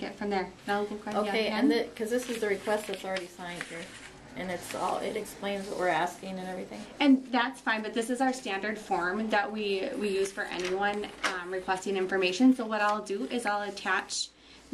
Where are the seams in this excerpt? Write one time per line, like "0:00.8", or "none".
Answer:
none